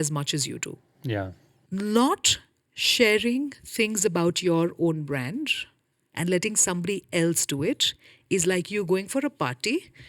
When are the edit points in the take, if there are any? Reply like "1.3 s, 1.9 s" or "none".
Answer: 1.5 s